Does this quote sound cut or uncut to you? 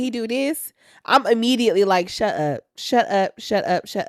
uncut